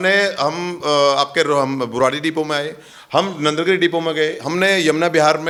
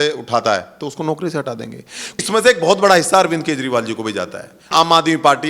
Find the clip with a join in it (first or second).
second